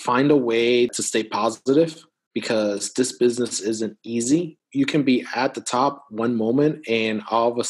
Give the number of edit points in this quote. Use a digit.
2